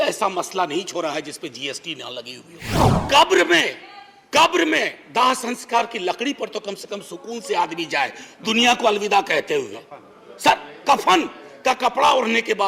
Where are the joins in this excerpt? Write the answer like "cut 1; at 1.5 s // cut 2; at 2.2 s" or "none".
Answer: cut 1; at 2.9 s